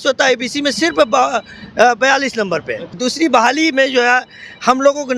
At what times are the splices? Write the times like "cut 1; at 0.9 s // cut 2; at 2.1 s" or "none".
cut 1; at 3.0 s